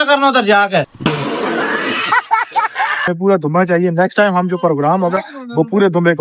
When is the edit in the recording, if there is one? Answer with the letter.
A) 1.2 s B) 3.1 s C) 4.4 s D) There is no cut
B